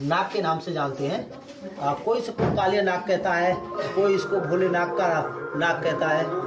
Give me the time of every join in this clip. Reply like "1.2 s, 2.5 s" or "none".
none